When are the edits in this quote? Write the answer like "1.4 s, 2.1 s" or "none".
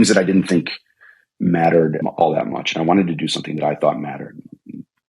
2.0 s